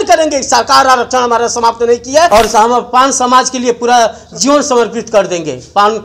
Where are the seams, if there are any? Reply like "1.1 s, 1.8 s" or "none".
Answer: 2.3 s